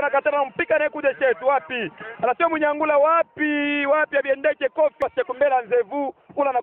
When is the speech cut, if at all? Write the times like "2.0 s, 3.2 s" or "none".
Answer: 5.0 s